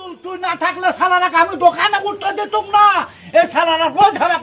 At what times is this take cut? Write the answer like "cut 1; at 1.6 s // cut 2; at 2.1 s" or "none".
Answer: none